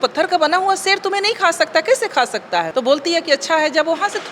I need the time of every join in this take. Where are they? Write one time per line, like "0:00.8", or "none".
0:02.7